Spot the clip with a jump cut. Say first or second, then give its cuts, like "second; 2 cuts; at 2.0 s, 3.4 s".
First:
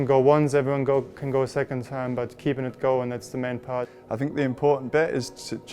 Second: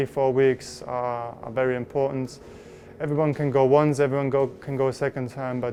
first; 1 cut; at 3.9 s